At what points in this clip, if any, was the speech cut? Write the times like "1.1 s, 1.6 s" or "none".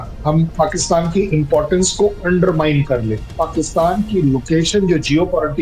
3.3 s

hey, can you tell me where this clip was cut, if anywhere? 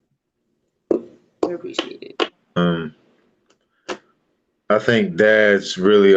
2.6 s

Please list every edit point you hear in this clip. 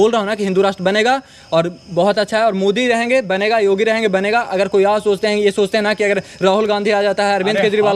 none

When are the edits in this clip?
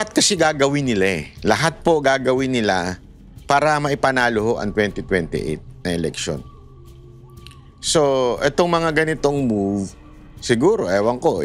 none

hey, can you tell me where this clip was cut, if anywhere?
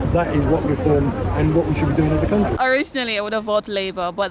2.6 s

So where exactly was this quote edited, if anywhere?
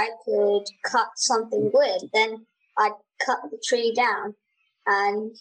none

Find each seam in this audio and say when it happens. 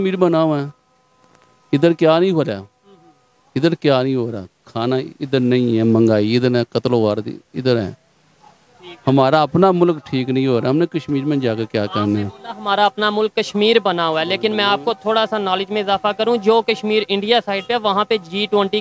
none

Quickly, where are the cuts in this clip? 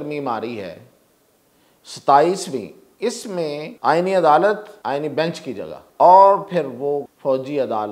3.7 s, 4.7 s, 5.8 s, 7.1 s

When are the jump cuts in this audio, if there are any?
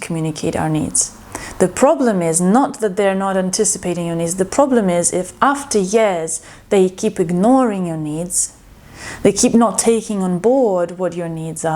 none

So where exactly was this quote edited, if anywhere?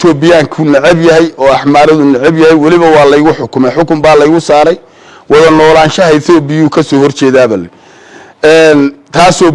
none

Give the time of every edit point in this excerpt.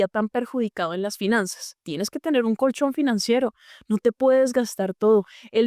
1.9 s

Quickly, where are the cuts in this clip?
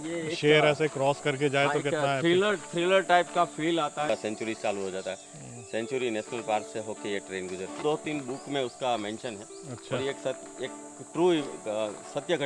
4.1 s, 7.8 s

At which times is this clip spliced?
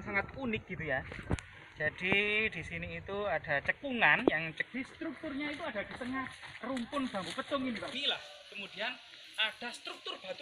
4.6 s, 8.0 s

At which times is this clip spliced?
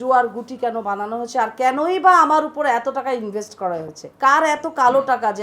4.0 s

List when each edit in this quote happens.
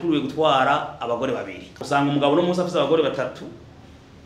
1.8 s

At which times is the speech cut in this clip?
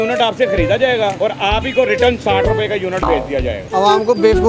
1.1 s, 3.6 s

